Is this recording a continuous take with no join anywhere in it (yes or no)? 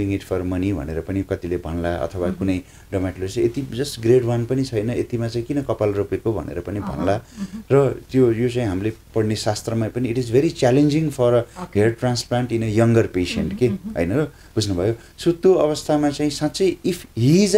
yes